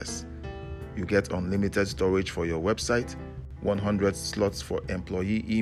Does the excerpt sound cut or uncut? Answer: uncut